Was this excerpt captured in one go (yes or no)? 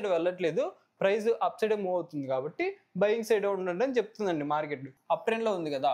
no